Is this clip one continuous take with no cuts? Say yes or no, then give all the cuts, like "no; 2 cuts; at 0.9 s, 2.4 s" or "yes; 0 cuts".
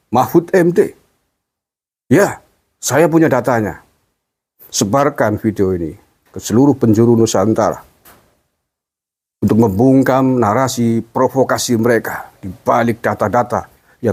yes; 0 cuts